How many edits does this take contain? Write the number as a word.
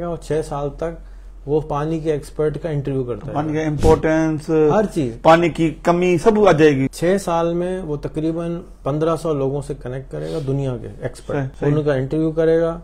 two